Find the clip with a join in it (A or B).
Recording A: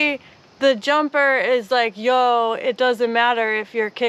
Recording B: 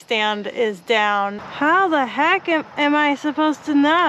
B